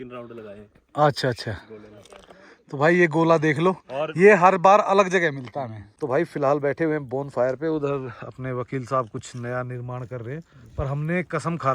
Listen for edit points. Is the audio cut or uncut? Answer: cut